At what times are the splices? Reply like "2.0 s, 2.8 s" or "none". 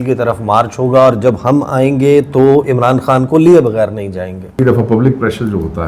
4.5 s